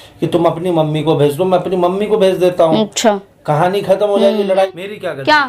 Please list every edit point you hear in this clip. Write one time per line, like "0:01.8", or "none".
0:04.5